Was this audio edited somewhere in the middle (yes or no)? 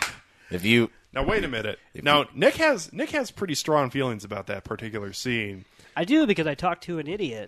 no